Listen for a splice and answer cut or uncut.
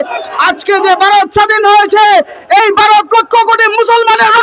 uncut